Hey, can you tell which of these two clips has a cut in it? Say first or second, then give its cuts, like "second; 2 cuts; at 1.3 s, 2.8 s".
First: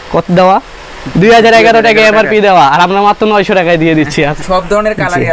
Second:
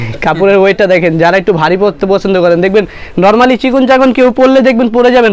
first; 1 cut; at 4.4 s